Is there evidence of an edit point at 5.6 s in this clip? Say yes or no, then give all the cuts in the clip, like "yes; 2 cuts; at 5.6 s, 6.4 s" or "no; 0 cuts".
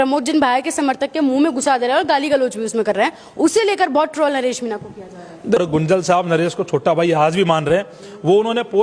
yes; 1 cut; at 5.6 s